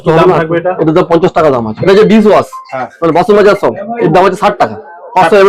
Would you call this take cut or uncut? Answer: cut